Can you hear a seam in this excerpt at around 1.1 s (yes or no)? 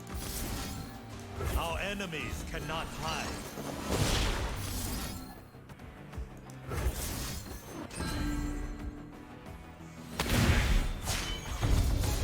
yes